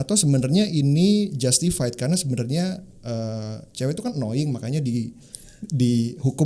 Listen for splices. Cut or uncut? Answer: uncut